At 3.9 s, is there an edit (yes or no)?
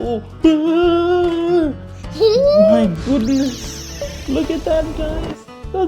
yes